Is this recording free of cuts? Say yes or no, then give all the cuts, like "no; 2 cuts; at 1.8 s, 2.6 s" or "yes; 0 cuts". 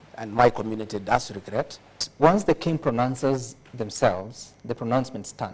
no; 1 cut; at 2.0 s